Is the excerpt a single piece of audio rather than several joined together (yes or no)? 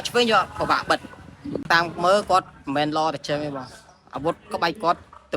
no